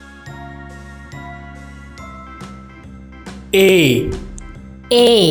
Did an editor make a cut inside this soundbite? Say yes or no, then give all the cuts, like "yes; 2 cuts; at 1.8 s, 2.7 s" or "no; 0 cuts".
yes; 1 cut; at 3.4 s